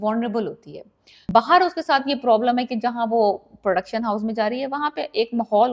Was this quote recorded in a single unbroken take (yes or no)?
no